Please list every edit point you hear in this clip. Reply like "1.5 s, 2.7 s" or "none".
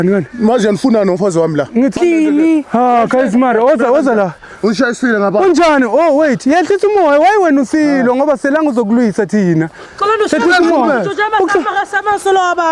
2.0 s